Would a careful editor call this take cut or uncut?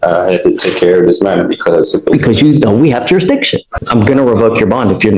cut